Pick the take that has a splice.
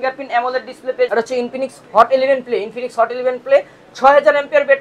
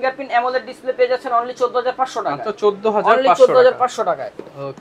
first; 1 cut; at 1.1 s

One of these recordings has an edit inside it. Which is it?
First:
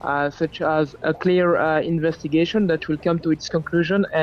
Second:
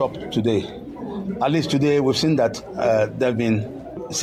first; 1 cut; at 0.9 s

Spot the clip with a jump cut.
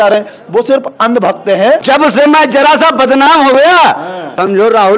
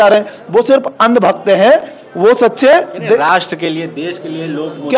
first; 1 cut; at 1.8 s

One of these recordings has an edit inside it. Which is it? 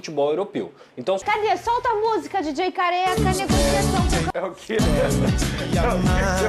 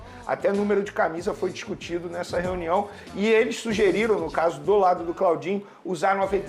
first; 2 cuts; at 1.2 s, 4.3 s

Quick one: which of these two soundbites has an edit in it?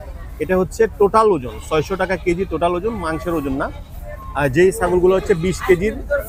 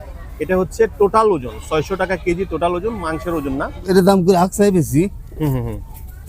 second; 1 cut; at 3.8 s

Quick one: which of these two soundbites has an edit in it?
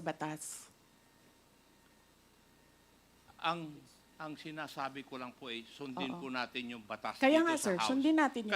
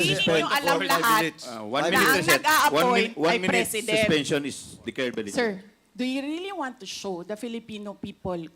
second; 1 cut; at 5.2 s

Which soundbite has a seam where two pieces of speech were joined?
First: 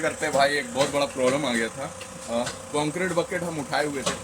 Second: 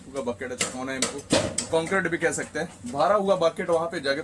second; 1 cut; at 2.8 s

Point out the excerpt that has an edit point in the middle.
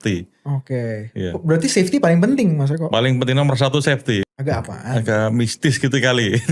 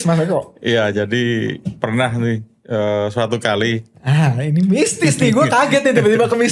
first; 1 cut; at 4.2 s

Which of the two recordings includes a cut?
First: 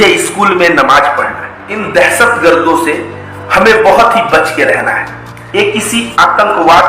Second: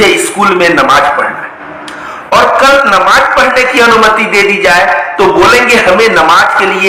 first; 2 cuts; at 1.8 s, 5.4 s

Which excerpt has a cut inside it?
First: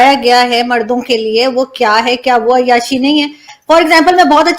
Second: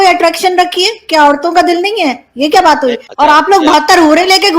second; 1 cut; at 3.0 s

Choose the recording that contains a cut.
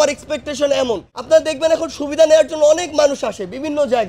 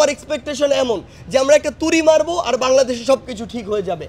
first; 1 cut; at 1.1 s

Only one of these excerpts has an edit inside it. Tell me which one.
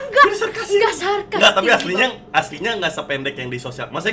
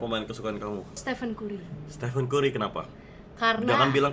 second; 1 cut; at 1.0 s

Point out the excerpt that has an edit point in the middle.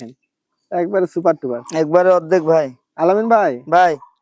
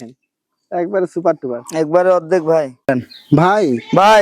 second; 1 cut; at 2.7 s

